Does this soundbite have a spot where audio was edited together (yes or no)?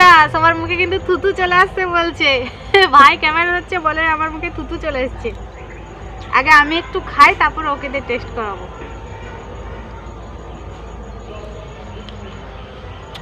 no